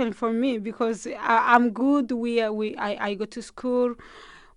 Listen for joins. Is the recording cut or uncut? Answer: uncut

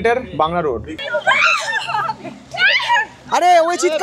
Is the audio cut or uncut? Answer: cut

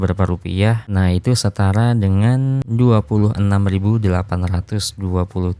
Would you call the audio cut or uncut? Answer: cut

